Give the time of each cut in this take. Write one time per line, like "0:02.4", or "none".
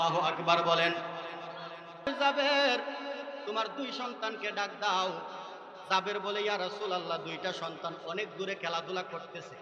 0:02.1